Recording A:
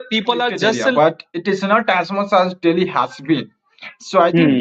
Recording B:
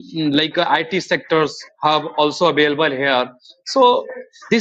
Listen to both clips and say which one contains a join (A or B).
A